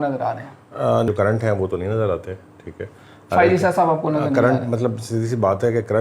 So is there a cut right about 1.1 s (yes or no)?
yes